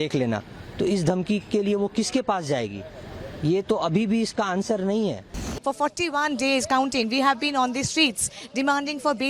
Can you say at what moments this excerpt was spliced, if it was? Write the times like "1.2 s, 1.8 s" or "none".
5.4 s